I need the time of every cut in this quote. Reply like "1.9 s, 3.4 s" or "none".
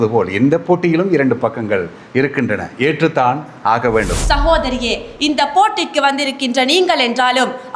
4.1 s